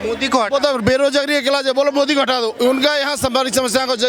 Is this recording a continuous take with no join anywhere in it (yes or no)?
yes